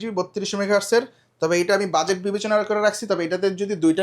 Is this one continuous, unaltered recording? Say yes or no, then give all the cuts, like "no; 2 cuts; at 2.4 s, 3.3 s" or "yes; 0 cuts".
yes; 0 cuts